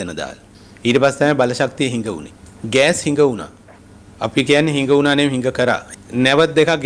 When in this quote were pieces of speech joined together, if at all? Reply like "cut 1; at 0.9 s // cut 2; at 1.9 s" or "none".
cut 1; at 5.9 s